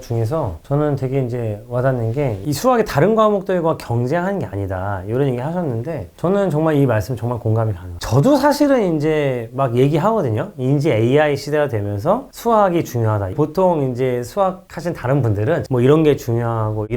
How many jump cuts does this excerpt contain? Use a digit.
3